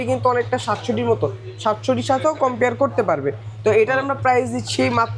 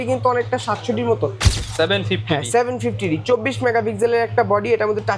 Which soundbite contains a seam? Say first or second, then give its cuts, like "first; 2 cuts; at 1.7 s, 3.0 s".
second; 1 cut; at 1.5 s